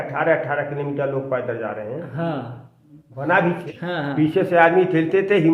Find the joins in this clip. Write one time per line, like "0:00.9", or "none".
0:03.7